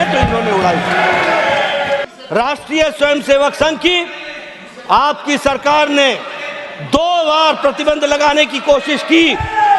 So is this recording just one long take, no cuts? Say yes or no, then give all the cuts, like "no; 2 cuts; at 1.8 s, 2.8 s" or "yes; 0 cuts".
no; 1 cut; at 2.0 s